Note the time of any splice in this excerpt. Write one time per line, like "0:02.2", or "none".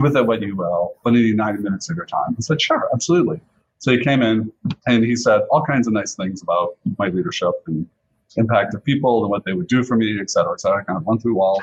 none